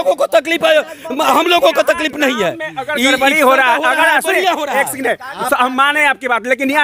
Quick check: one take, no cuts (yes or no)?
yes